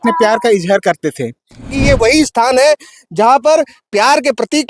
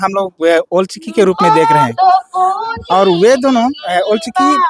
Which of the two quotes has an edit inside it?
first; 1 cut; at 1.7 s

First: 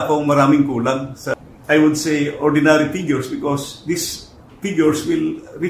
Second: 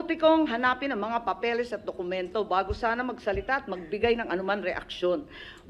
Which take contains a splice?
first; 1 cut; at 1.2 s

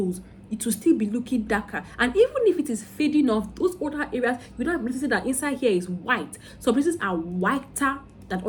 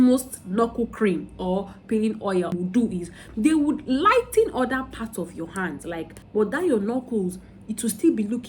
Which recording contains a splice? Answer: second; 2 cuts; at 2.5 s, 6.2 s

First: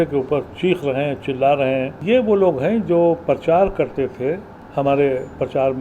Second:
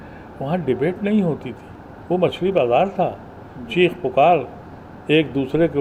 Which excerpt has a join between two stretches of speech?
first; 2 cuts; at 1.9 s, 4.5 s

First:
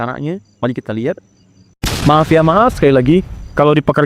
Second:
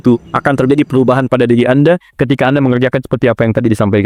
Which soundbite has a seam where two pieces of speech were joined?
first; 1 cut; at 1.9 s

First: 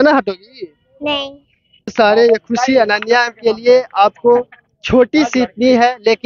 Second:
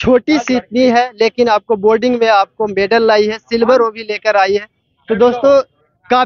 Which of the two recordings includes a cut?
first; 1 cut; at 1.9 s

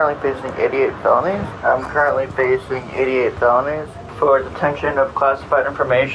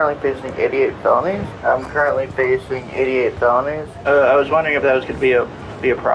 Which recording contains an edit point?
second; 1 cut; at 3.9 s

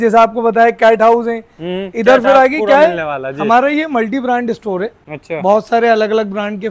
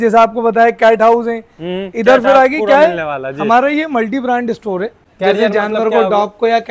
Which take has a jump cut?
second; 1 cut; at 5.1 s

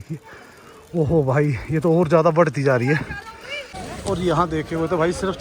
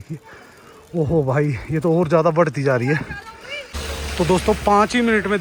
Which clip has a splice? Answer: first; 1 cut; at 3.7 s

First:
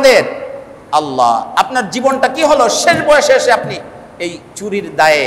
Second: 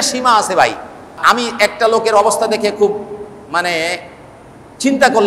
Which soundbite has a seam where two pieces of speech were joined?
second; 1 cut; at 1.2 s

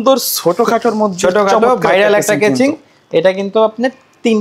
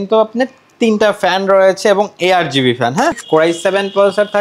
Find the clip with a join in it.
second; 1 cut; at 3.2 s

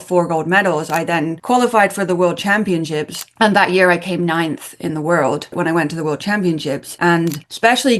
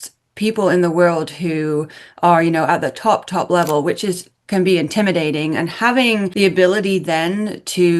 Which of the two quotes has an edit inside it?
first; 3 cuts; at 1.4 s, 5.5 s, 6.9 s

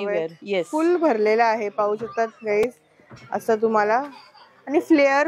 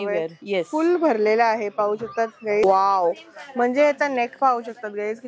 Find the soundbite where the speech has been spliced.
second; 1 cut; at 2.6 s

